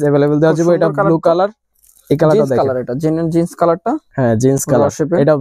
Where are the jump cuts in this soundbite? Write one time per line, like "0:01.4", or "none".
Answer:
none